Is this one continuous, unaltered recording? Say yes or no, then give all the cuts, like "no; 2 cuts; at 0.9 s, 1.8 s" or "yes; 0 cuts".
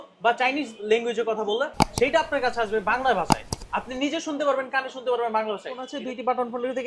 no; 1 cut; at 5.9 s